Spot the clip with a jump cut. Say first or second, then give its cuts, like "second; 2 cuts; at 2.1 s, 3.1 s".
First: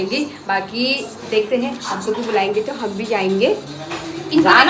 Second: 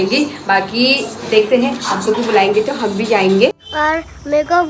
second; 1 cut; at 3.5 s